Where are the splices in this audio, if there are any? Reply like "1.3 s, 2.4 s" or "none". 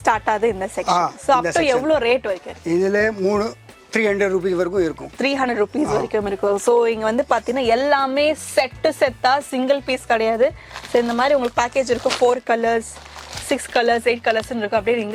none